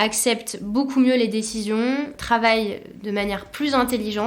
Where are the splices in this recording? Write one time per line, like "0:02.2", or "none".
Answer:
0:02.2

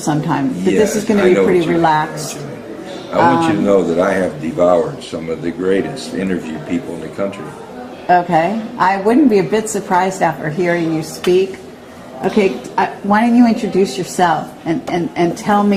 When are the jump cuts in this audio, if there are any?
none

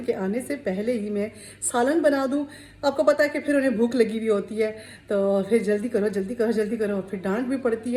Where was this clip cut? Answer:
none

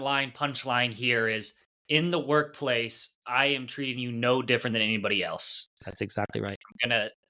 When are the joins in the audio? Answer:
none

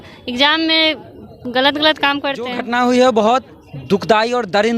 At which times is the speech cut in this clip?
0:02.6

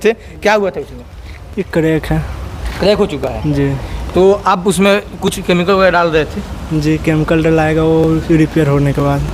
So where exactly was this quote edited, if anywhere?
none

